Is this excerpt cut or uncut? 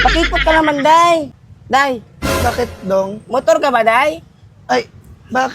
cut